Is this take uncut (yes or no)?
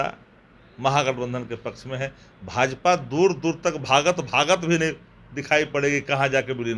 yes